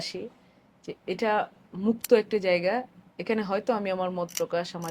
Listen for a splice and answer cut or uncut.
uncut